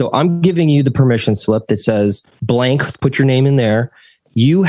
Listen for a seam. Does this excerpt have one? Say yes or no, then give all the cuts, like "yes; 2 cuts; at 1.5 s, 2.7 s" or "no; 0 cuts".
yes; 1 cut; at 2.3 s